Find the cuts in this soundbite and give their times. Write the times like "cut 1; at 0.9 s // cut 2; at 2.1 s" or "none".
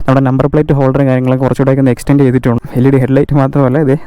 cut 1; at 2.6 s